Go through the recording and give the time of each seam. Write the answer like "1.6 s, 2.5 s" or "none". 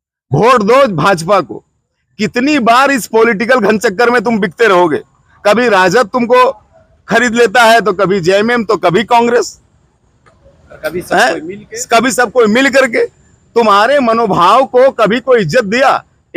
none